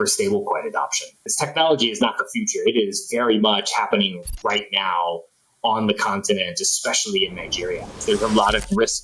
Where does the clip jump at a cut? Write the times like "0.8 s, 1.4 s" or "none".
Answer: 1.3 s, 8.0 s